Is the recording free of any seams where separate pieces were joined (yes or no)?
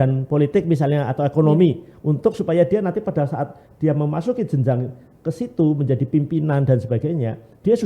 yes